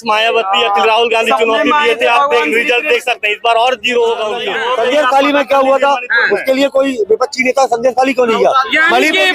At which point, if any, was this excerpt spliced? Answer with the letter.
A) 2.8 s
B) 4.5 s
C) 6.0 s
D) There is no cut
B